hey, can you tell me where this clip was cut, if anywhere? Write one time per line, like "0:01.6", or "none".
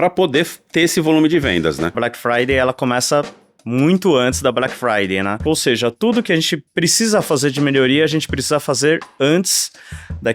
0:02.0
0:05.4

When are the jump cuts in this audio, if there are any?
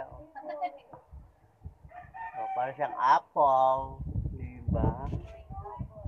none

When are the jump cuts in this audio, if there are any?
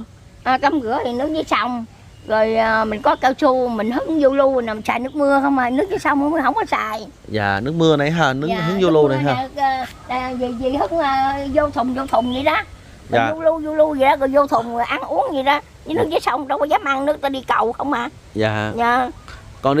none

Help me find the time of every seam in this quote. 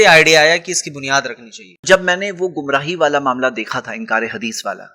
none

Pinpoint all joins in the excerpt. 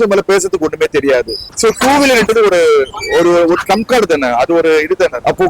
0:01.4

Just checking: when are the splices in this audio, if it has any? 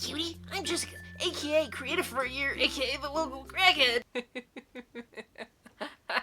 none

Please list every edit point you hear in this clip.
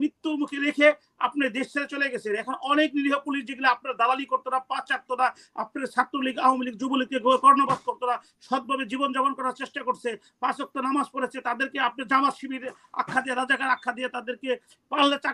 none

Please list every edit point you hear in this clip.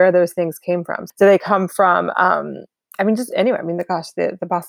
0:01.0

